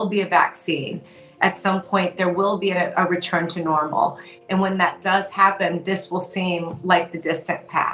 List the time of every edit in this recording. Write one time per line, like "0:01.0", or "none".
none